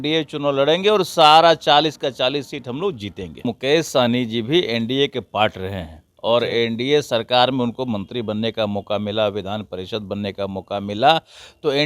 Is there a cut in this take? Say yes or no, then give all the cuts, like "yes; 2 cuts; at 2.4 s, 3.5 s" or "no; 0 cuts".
yes; 1 cut; at 3.4 s